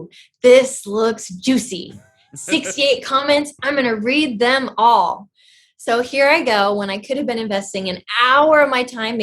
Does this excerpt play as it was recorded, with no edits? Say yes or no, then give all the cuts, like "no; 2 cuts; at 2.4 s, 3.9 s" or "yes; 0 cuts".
yes; 0 cuts